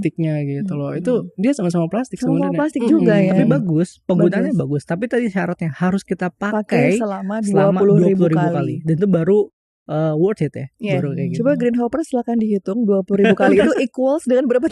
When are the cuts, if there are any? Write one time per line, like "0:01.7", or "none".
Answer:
none